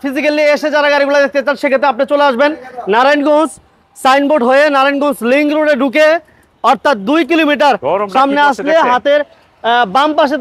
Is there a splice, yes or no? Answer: no